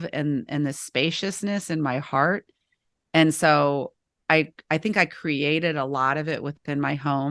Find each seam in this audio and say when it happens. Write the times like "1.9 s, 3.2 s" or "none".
none